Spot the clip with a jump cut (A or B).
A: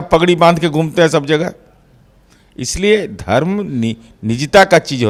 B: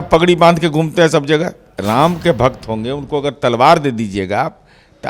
B